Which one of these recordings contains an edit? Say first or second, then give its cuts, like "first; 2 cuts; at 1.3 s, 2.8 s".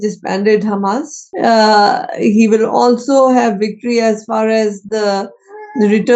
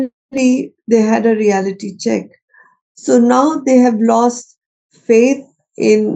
first; 1 cut; at 1.2 s